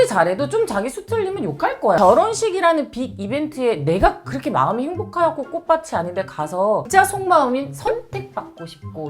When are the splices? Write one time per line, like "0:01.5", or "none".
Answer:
0:02.0
0:06.8